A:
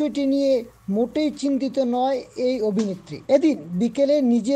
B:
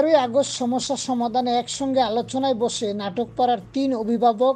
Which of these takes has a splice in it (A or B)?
A